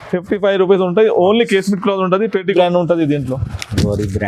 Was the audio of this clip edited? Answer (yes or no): yes